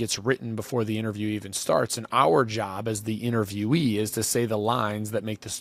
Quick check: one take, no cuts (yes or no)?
yes